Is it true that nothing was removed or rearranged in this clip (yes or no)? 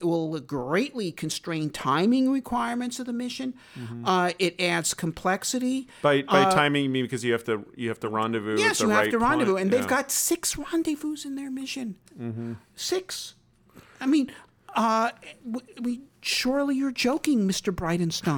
yes